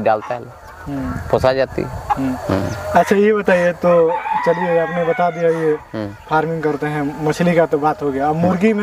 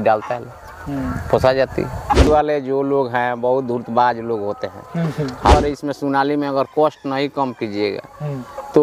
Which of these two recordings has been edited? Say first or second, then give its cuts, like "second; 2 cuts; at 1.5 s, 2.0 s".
second; 2 cuts; at 2.3 s, 5.5 s